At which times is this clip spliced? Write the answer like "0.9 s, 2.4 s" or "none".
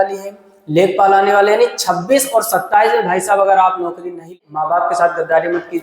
4.4 s